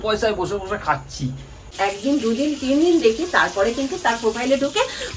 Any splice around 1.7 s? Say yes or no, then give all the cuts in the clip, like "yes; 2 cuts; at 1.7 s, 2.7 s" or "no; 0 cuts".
yes; 1 cut; at 1.7 s